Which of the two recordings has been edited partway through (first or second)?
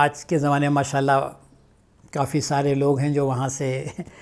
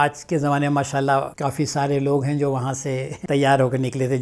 second